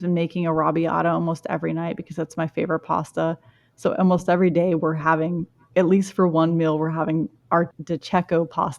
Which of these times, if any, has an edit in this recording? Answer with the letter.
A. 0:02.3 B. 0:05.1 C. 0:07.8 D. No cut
C